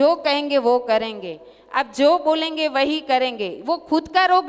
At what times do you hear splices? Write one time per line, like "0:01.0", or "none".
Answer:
none